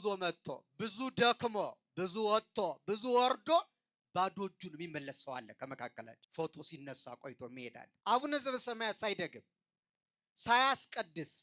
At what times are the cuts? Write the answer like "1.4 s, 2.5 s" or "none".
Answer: 6.2 s, 7.9 s